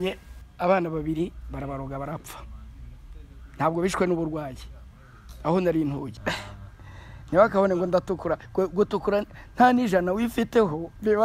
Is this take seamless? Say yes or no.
no